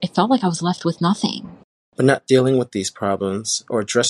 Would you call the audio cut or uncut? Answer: cut